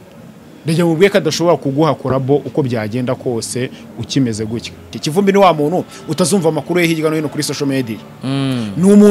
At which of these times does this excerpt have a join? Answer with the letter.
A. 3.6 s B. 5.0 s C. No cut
B